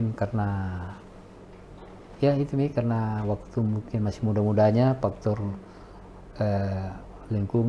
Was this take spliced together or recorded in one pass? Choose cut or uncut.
uncut